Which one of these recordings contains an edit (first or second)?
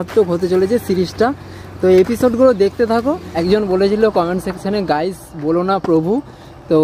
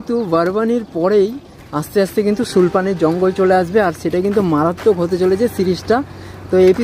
first